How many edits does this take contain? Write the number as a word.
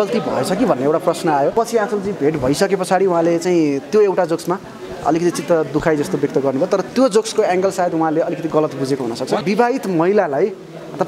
two